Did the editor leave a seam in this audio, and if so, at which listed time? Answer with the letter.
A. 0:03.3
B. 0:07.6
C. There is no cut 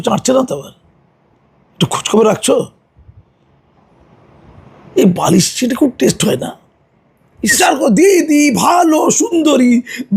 B